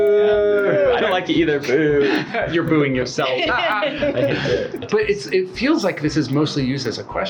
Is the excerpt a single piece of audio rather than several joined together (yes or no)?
yes